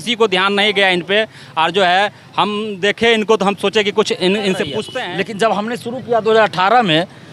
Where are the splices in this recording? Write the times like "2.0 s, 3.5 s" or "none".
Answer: 5.0 s